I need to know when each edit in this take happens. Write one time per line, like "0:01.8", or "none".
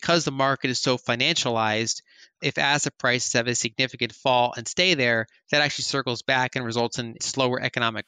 0:02.4
0:07.2